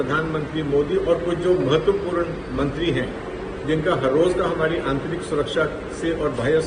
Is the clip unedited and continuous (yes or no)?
yes